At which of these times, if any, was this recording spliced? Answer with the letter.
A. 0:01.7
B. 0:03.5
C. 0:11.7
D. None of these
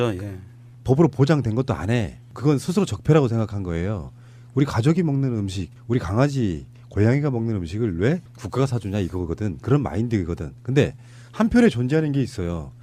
B